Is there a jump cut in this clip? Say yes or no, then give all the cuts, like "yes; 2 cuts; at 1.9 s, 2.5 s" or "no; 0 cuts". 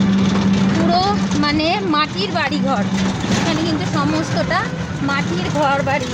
no; 0 cuts